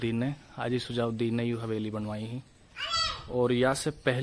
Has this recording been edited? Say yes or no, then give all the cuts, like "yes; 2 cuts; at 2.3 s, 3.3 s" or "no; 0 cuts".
no; 0 cuts